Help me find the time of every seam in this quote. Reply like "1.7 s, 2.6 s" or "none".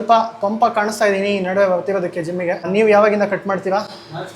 2.7 s